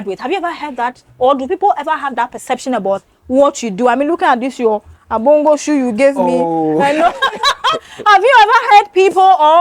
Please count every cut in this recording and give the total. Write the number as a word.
zero